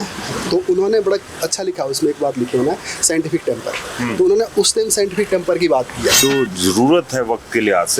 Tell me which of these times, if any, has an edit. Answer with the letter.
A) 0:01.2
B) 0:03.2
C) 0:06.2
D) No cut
C